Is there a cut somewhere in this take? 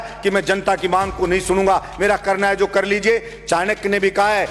no; 0 cuts

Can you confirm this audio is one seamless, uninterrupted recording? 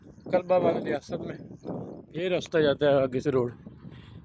yes; 0 cuts

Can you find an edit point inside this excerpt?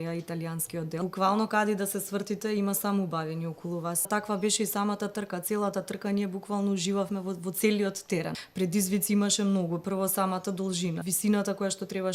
yes; 4 cuts; at 1.0 s, 4.1 s, 8.4 s, 11.0 s

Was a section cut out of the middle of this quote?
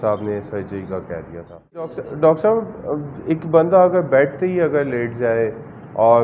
yes; 1 cut; at 2.0 s

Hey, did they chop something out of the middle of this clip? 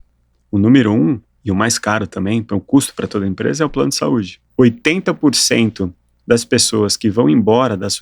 yes; 1 cut; at 4.4 s

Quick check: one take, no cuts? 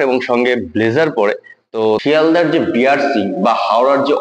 no; 1 cut; at 1.9 s

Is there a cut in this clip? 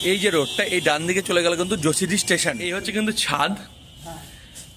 yes; 1 cut; at 2.9 s

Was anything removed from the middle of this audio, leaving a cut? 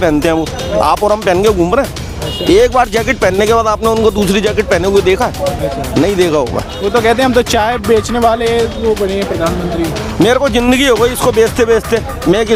no; 0 cuts

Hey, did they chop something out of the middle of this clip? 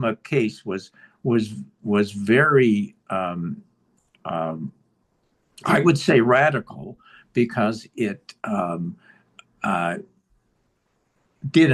no; 0 cuts

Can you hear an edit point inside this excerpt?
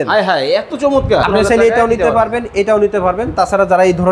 yes; 1 cut; at 1.2 s

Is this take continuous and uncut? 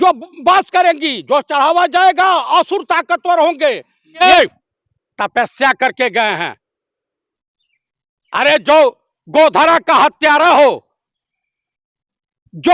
no; 1 cut; at 4.2 s

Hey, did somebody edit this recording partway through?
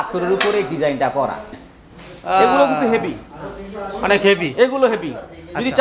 yes; 1 cut; at 1.5 s

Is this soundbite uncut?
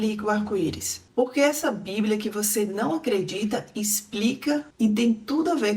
yes; 0 cuts

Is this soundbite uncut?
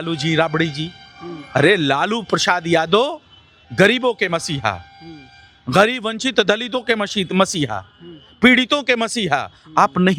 yes; 0 cuts

